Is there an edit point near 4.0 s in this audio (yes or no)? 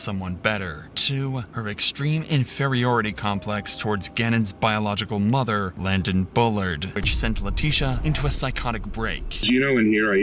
no